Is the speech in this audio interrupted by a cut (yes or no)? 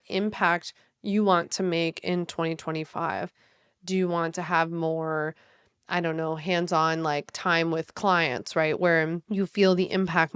no